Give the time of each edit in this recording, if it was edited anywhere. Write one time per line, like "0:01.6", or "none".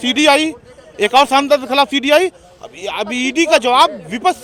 none